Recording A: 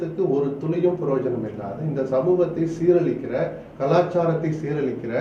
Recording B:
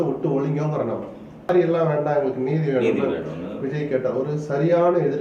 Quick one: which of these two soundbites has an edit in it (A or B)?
B